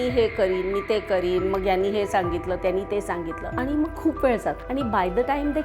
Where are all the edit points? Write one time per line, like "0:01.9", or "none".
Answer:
0:03.4
0:04.6